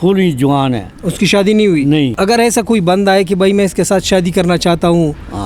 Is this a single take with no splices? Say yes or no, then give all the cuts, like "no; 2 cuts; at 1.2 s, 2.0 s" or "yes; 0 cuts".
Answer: no; 1 cut; at 2.1 s